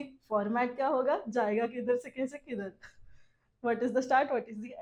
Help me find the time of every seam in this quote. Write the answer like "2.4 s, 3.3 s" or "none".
none